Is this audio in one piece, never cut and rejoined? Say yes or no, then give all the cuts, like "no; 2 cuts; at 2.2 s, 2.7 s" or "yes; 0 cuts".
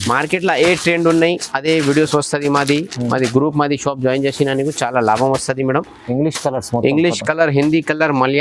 yes; 0 cuts